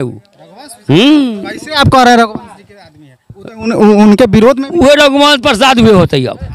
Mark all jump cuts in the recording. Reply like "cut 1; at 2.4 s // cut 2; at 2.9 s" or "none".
none